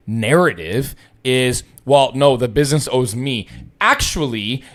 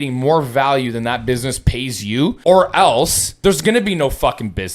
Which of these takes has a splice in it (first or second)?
second